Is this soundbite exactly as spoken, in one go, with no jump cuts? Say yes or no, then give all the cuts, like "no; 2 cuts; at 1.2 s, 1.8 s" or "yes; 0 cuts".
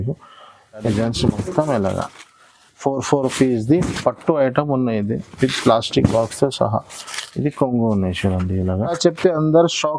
no; 2 cuts; at 0.8 s, 9.0 s